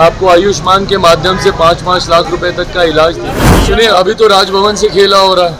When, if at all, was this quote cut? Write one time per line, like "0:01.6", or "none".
0:03.5